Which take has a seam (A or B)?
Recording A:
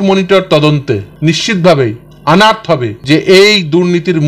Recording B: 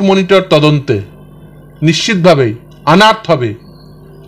A